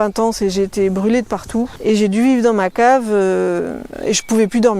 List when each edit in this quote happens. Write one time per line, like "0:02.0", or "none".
0:01.7
0:03.9